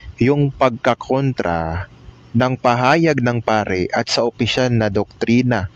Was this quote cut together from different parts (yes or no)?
yes